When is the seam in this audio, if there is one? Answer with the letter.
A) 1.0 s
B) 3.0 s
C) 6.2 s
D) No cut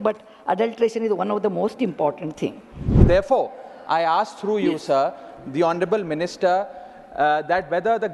B